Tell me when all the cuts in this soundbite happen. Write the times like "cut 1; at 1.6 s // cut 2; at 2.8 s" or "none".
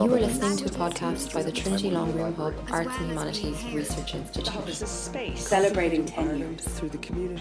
none